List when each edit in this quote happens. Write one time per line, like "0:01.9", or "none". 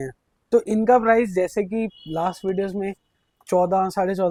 none